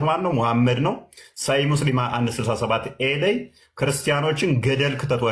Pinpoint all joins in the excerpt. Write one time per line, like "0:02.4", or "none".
none